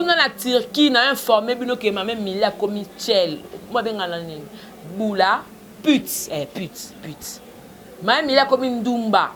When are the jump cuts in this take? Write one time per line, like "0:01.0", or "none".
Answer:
none